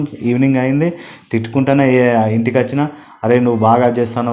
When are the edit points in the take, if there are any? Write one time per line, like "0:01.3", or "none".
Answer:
none